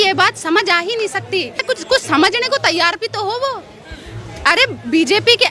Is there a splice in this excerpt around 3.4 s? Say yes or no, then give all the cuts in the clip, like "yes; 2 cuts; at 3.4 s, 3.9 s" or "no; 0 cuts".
no; 1 cut; at 1.6 s